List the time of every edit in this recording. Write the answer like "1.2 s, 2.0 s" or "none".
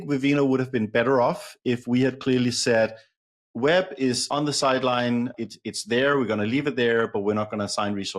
4.2 s, 5.3 s